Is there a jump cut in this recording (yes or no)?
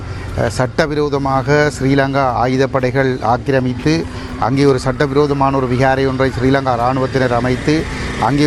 no